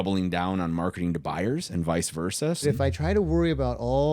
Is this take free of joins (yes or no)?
no